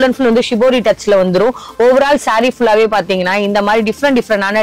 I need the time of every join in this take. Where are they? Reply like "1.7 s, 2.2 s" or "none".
none